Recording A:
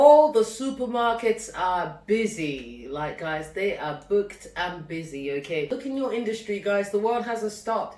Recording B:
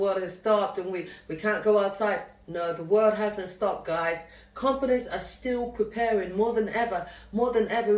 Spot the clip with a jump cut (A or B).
A